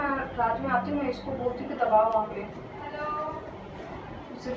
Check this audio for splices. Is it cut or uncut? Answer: uncut